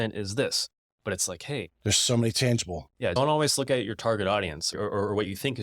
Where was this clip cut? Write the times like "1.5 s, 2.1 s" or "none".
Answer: 3.1 s, 4.7 s